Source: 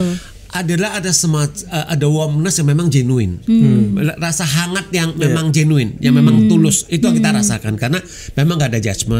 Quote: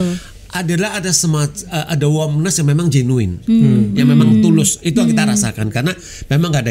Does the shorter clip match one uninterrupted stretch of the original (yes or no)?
no